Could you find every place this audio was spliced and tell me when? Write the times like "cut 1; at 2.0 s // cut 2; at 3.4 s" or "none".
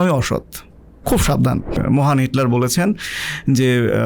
cut 1; at 1.8 s